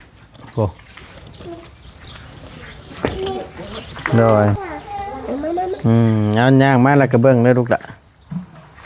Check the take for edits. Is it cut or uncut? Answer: cut